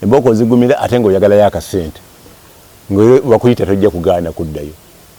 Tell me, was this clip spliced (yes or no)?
no